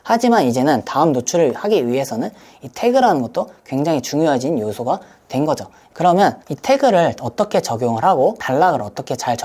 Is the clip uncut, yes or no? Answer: no